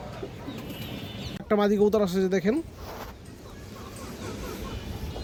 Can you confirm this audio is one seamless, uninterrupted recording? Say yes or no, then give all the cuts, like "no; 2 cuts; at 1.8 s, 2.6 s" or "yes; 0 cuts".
yes; 0 cuts